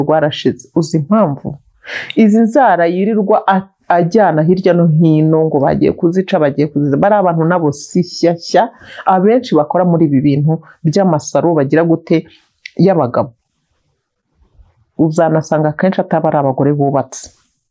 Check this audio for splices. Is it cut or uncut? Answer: uncut